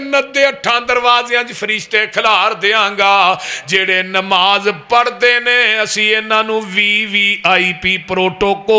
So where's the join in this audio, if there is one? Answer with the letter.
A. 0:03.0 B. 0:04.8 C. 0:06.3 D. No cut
D